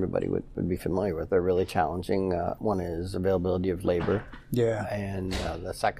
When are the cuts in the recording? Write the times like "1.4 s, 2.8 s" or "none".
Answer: 1.2 s, 2.6 s